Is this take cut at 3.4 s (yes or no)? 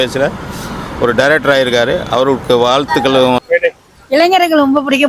yes